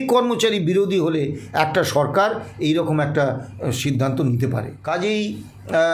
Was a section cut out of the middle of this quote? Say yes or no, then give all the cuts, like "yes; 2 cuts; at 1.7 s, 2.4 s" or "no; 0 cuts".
yes; 1 cut; at 4.7 s